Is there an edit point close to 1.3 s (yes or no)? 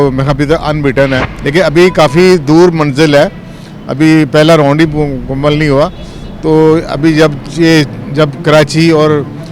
yes